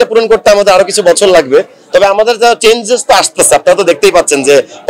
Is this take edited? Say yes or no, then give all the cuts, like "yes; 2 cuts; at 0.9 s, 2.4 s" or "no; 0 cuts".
no; 0 cuts